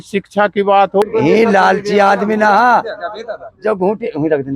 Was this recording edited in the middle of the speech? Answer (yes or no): yes